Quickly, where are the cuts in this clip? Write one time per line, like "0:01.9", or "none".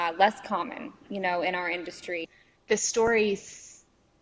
0:02.3